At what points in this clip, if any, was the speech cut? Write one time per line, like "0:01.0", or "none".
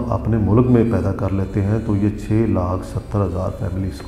none